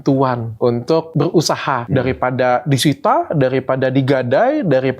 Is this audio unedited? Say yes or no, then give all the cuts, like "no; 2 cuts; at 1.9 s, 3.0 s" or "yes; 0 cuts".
no; 2 cuts; at 0.8 s, 1.8 s